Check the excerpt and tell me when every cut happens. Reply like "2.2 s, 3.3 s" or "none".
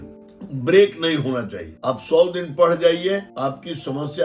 none